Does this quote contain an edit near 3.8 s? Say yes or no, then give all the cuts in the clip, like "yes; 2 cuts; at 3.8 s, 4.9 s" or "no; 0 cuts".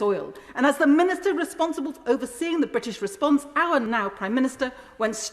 yes; 1 cut; at 3.8 s